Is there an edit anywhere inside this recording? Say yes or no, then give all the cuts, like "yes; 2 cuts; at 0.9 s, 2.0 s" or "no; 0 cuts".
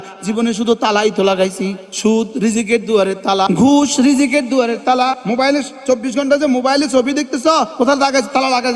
yes; 4 cuts; at 1.8 s, 3.5 s, 5.2 s, 7.7 s